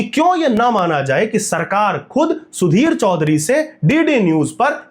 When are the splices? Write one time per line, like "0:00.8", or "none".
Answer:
none